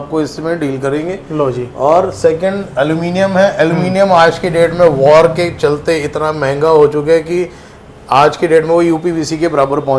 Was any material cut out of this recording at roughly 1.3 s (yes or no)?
no